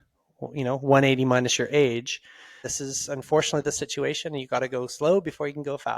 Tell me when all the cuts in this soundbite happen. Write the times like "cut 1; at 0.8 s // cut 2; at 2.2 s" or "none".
cut 1; at 2.7 s